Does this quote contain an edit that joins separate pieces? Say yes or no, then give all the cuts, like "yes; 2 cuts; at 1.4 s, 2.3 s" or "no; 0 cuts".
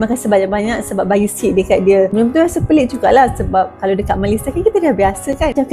no; 0 cuts